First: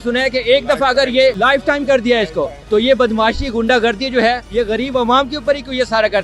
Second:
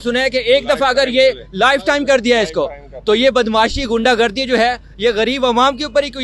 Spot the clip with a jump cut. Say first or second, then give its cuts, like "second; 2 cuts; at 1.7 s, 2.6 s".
first; 3 cuts; at 1.4 s, 2.6 s, 4.4 s